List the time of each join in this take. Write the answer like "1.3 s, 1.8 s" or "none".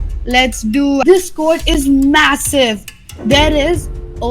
1.0 s